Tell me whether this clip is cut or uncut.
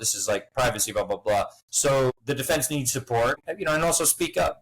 cut